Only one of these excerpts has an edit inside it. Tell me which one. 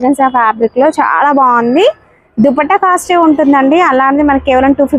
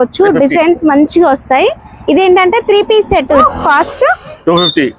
second; 1 cut; at 3.4 s

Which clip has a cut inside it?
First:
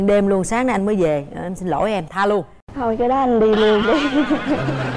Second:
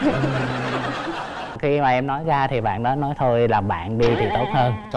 second; 1 cut; at 1.6 s

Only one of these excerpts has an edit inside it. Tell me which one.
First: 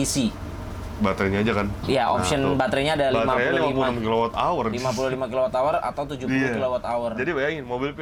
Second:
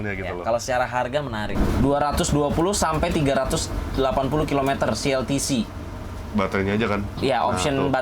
second; 1 cut; at 1.5 s

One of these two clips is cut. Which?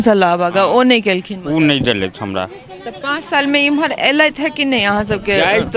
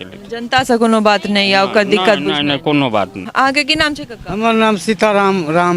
second; 1 cut; at 3.2 s

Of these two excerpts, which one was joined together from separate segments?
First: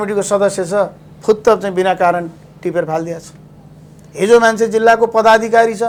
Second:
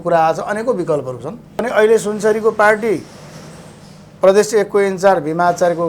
second; 1 cut; at 1.7 s

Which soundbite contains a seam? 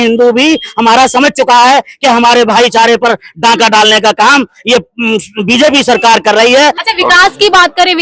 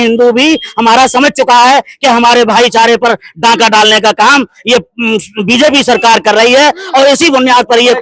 first; 1 cut; at 6.8 s

